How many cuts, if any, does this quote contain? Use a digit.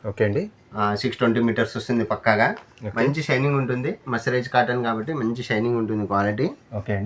0